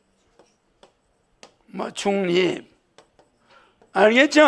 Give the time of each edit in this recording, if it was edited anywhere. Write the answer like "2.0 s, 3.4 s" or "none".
none